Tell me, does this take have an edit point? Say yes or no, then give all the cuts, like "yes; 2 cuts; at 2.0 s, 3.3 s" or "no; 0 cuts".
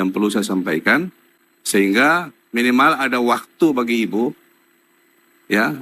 no; 0 cuts